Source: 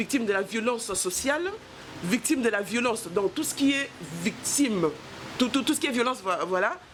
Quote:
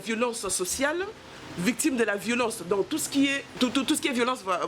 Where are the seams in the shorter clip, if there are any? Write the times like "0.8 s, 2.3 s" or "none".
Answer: 3.4 s